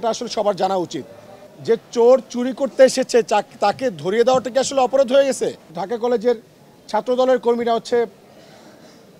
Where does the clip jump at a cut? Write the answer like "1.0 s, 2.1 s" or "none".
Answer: 1.5 s, 5.7 s